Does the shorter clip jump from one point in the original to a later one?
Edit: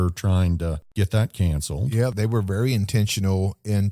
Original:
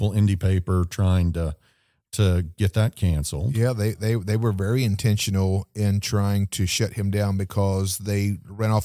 yes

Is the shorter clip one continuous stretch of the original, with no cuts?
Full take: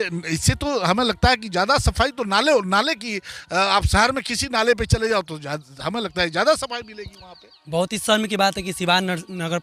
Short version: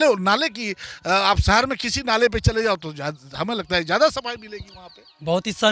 yes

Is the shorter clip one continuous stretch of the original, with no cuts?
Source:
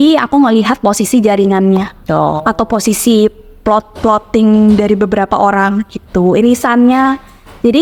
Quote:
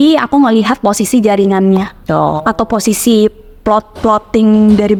yes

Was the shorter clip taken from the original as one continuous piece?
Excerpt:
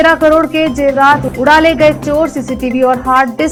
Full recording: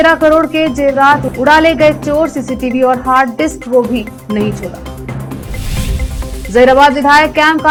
yes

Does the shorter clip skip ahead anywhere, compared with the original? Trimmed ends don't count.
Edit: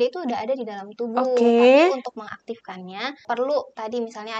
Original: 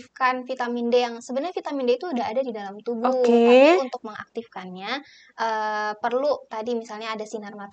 yes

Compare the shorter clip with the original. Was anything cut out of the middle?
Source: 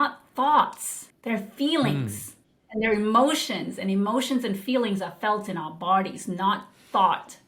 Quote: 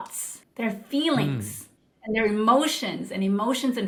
no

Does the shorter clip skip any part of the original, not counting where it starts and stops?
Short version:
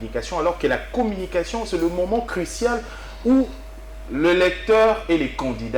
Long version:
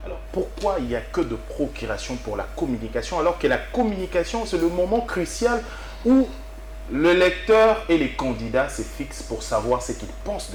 no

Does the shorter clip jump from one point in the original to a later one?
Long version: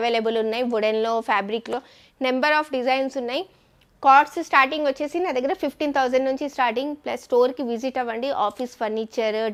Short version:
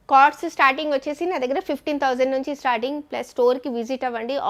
no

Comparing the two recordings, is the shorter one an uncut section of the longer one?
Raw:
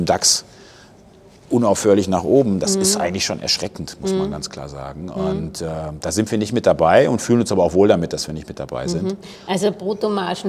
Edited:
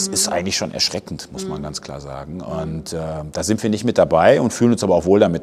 yes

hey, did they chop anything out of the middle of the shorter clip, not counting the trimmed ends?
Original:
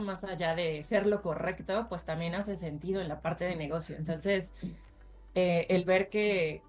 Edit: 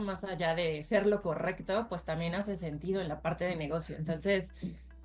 no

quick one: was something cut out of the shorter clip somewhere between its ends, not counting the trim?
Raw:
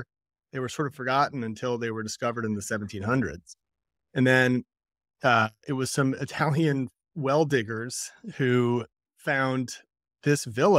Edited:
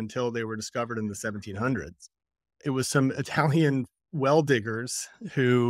yes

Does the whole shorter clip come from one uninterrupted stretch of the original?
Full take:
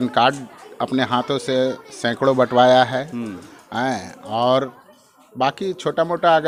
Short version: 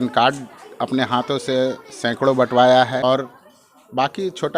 no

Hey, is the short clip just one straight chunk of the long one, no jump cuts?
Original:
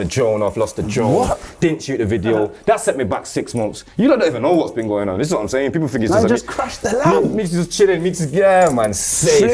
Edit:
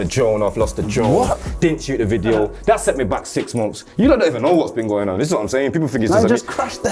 yes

